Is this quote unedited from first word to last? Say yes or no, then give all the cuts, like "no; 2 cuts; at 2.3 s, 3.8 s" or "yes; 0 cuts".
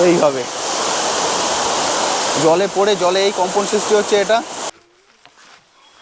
no; 1 cut; at 4.6 s